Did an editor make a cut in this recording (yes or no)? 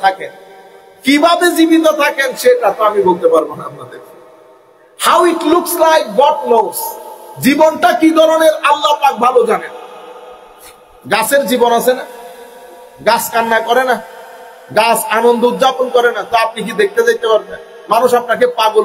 no